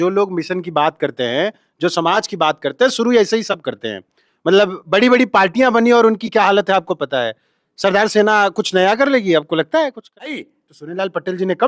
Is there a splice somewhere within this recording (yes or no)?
yes